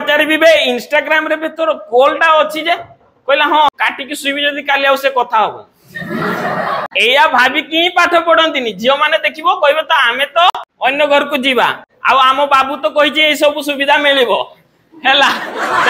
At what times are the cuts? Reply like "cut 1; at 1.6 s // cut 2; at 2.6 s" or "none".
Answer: cut 1; at 3.7 s // cut 2; at 6.9 s // cut 3; at 10.7 s